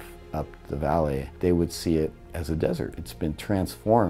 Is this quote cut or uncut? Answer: cut